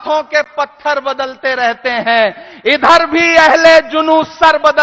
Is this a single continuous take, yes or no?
yes